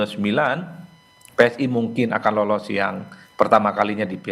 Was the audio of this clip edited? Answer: no; 0 cuts

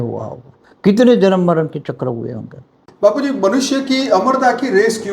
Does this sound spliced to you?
yes; 1 cut; at 2.8 s

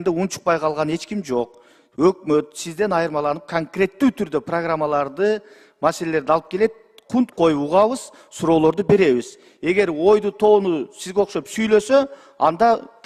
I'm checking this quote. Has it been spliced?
no; 0 cuts

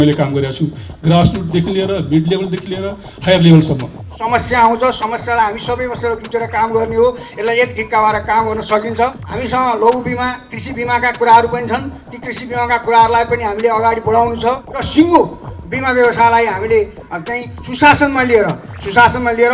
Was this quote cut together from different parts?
yes; 3 cuts; at 4.1 s, 9.3 s, 14.7 s

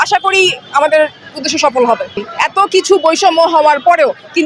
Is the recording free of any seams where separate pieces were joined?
no; 1 cut; at 2.1 s

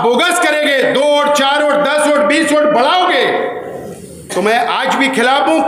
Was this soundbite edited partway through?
no; 0 cuts

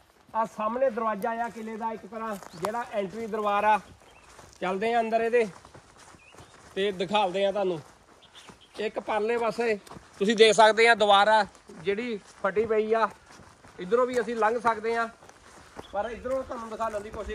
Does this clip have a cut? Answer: no; 0 cuts

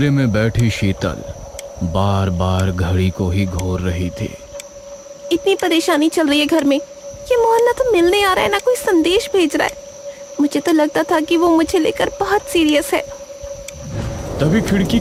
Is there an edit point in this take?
no; 0 cuts

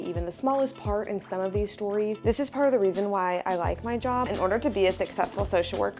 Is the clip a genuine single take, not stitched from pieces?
no; 2 cuts; at 2.2 s, 4.3 s

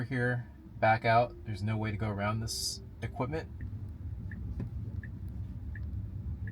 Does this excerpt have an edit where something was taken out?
yes; 1 cut; at 3.6 s

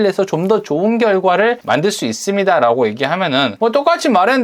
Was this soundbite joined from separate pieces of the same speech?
yes; 2 cuts; at 1.6 s, 3.5 s

